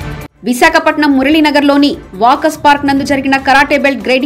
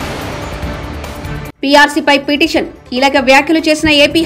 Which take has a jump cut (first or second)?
second